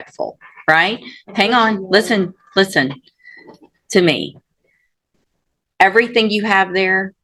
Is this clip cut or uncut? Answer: uncut